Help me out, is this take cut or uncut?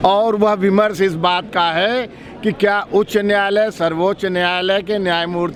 uncut